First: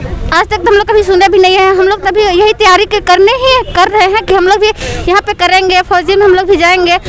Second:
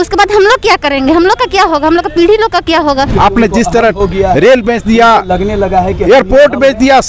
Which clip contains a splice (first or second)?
second